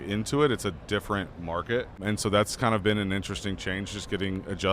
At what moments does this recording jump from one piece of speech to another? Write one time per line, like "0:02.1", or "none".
0:02.0